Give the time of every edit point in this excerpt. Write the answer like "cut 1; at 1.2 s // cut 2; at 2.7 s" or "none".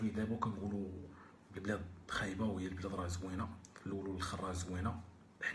none